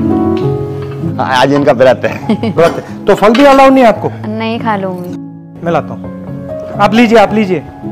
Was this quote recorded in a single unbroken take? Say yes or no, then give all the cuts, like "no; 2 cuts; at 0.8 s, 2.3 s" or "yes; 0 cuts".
no; 1 cut; at 1.1 s